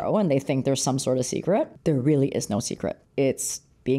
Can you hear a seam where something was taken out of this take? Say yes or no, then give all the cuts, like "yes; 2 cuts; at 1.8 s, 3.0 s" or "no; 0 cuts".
yes; 2 cuts; at 1.7 s, 3.0 s